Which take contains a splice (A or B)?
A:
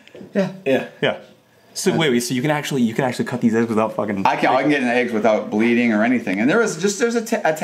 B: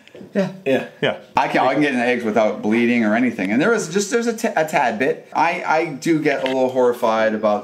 B